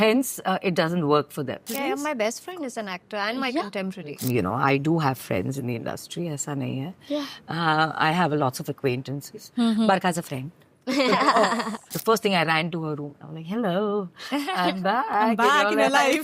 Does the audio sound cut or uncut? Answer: cut